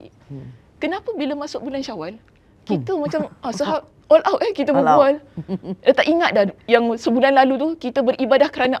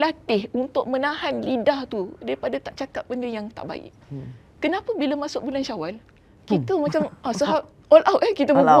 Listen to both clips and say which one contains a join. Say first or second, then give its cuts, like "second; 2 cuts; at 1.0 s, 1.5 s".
first; 1 cut; at 6.6 s